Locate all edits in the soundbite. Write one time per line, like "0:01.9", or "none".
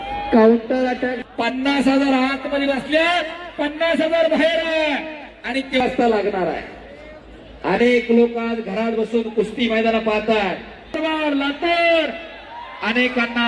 0:01.2
0:05.8
0:10.9